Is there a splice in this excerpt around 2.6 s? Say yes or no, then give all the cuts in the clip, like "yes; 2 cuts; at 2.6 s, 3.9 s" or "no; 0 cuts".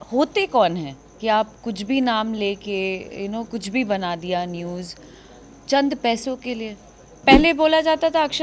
no; 1 cut; at 7.1 s